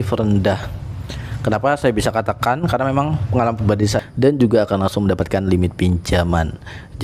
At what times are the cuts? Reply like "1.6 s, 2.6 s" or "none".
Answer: 4.0 s